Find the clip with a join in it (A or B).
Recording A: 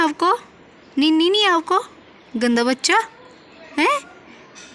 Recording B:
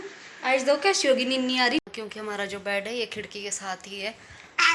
B